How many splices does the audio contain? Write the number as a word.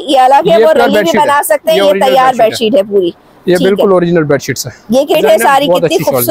one